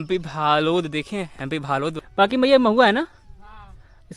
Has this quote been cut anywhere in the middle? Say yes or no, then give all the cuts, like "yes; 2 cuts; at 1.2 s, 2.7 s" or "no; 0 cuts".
yes; 1 cut; at 1.9 s